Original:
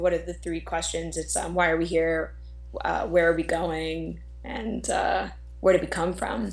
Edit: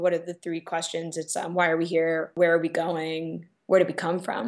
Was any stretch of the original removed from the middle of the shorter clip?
yes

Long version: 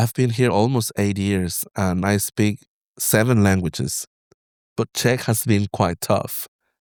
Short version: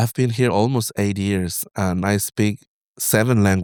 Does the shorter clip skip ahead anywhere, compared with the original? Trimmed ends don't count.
no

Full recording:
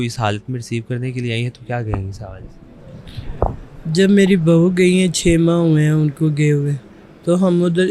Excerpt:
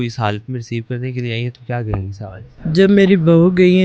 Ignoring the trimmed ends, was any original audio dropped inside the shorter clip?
yes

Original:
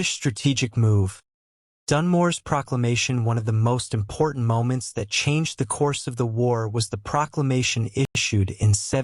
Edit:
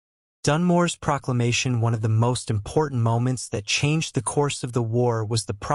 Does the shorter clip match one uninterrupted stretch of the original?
yes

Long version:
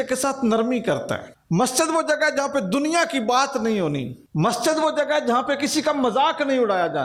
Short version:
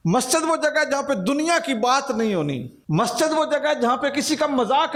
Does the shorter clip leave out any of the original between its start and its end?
no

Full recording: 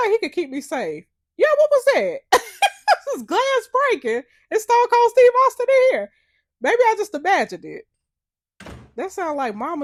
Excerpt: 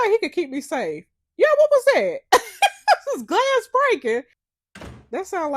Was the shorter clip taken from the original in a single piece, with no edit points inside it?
no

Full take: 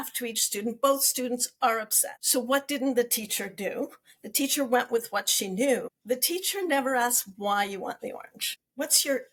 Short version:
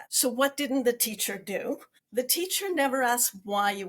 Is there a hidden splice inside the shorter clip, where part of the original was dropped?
yes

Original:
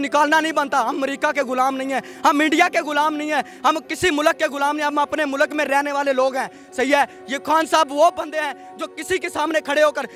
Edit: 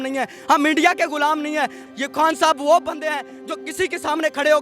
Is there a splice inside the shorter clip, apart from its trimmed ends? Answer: yes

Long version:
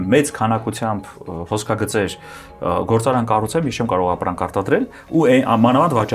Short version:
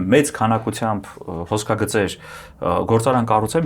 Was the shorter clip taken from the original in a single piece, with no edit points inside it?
yes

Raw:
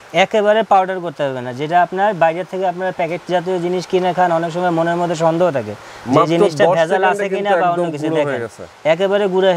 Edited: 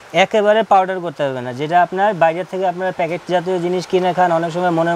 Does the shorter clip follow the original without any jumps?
yes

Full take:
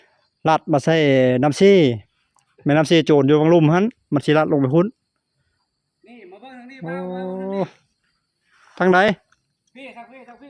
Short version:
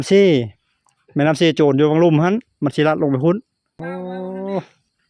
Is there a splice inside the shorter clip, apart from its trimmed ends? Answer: yes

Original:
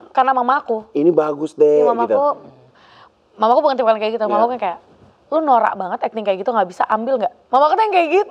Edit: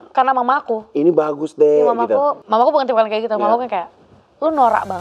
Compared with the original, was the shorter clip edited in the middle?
yes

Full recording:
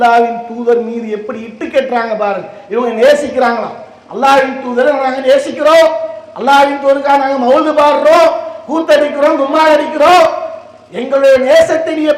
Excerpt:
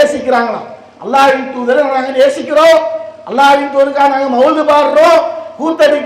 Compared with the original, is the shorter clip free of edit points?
yes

